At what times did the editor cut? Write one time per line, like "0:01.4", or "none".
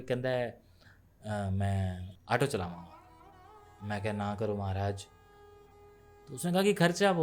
0:02.0

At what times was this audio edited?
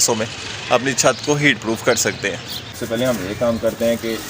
0:02.4

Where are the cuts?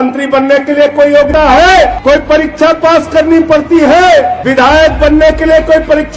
0:01.3
0:02.0
0:04.4

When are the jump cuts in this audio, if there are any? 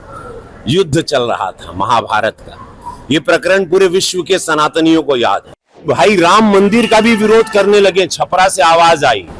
0:05.9

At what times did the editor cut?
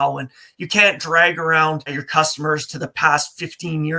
0:02.0

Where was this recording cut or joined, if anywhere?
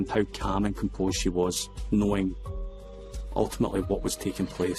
none

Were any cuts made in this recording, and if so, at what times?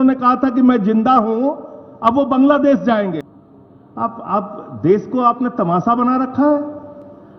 0:03.2

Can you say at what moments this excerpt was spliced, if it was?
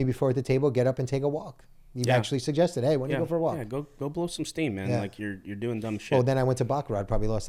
none

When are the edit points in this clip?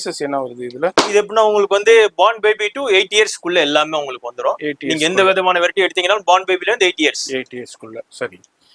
none

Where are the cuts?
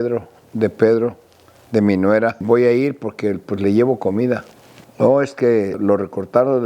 0:02.3
0:04.8

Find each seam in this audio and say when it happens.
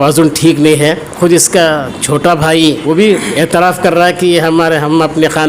0:01.1
0:02.8

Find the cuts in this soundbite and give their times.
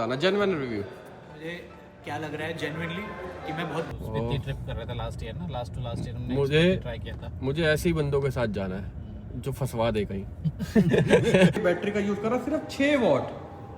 0:03.9
0:11.6

